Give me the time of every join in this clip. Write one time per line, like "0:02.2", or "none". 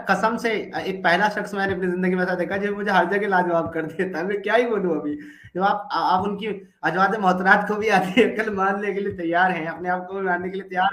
none